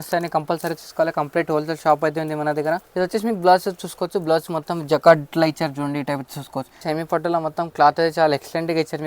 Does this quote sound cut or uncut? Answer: cut